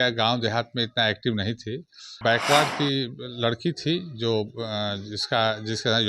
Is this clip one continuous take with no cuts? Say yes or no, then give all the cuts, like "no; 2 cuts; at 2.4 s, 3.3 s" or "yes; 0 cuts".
no; 1 cut; at 2.0 s